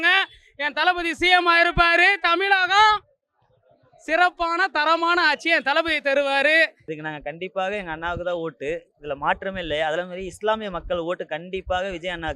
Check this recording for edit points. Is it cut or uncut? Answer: cut